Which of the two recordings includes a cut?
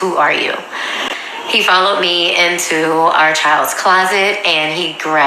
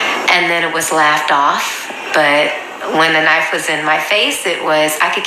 first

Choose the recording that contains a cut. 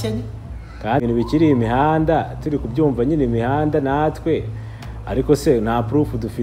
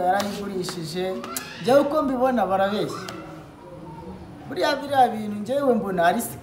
first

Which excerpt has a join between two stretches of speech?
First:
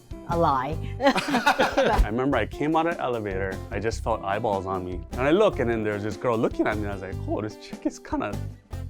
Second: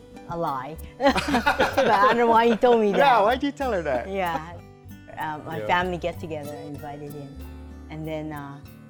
first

